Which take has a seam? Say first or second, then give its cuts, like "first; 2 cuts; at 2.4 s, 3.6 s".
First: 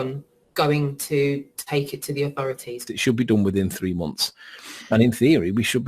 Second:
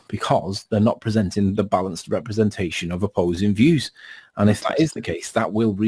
first; 1 cut; at 2.8 s